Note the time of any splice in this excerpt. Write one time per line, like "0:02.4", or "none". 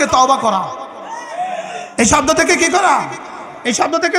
none